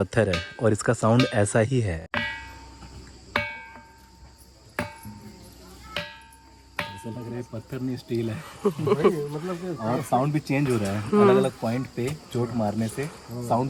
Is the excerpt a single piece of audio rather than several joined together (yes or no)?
yes